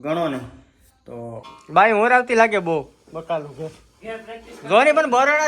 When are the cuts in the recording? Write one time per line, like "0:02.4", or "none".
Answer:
0:01.5